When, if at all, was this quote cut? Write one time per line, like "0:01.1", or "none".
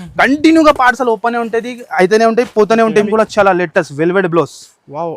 0:03.1